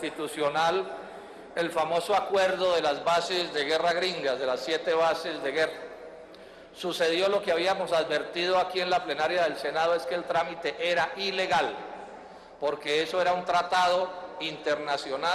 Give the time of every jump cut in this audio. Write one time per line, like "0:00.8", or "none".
none